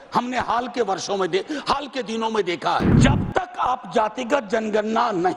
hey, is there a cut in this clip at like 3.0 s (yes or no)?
yes